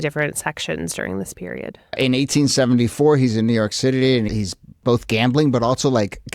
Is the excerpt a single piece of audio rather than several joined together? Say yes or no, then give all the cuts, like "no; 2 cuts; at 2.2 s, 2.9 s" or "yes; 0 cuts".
no; 2 cuts; at 2.0 s, 4.3 s